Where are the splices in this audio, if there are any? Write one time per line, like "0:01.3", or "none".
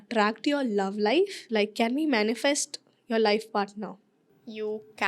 0:01.4